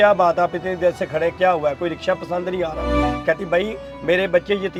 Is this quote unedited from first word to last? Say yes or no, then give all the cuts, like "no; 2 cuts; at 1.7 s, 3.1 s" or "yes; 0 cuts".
yes; 0 cuts